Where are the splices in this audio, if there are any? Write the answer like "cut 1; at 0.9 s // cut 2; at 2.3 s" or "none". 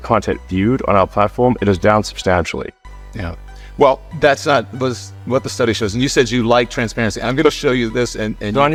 none